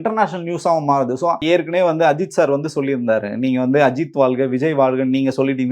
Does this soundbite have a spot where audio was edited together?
yes; 1 cut; at 1.4 s

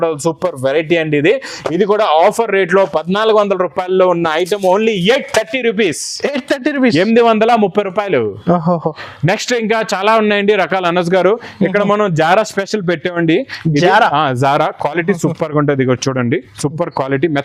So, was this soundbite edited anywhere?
no; 0 cuts

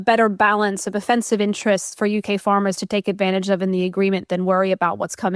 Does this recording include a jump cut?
yes; 1 cut; at 1.0 s

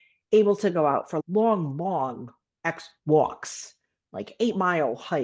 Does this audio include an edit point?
yes; 1 cut; at 1.1 s

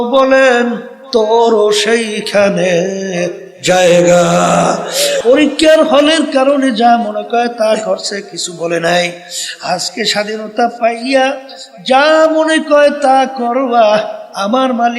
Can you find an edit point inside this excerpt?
yes; 1 cut; at 5.1 s

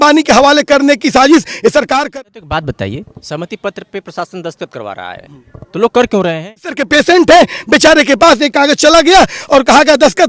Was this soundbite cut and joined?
yes; 2 cuts; at 2.0 s, 6.8 s

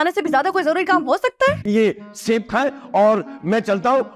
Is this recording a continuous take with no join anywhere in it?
no; 1 cut; at 1.6 s

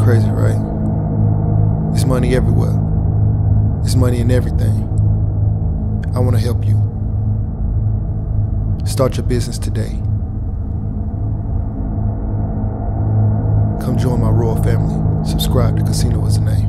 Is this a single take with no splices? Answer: yes; 0 cuts

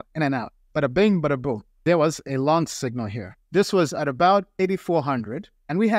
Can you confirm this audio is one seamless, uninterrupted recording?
no; 1 cut; at 1.7 s

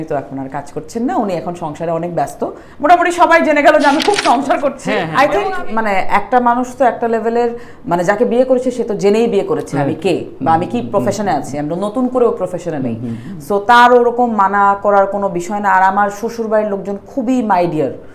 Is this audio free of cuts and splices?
no; 1 cut; at 4.8 s

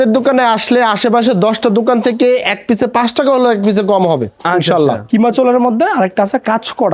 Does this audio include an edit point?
yes; 1 cut; at 5.1 s

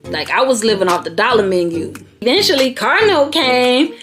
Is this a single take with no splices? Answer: no; 1 cut; at 2.2 s

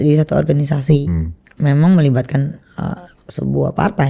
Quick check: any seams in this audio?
yes; 1 cut; at 1.1 s

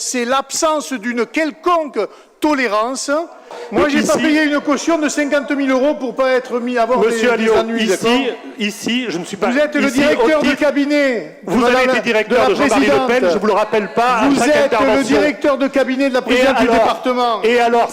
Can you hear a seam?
yes; 1 cut; at 3.6 s

